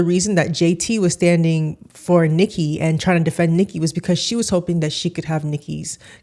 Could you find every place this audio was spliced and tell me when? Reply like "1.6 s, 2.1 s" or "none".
none